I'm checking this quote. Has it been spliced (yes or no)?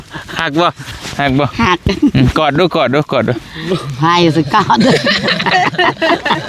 no